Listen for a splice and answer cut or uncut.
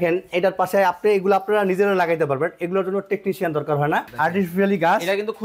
cut